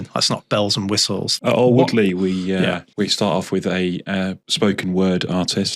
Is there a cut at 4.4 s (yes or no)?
yes